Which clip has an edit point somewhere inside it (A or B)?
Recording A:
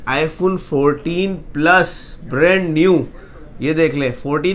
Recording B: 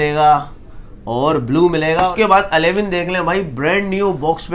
B